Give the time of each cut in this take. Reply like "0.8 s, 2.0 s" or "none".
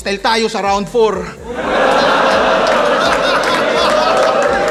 none